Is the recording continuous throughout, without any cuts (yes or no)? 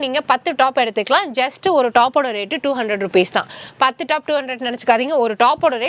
yes